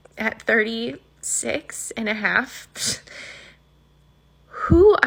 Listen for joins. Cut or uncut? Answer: uncut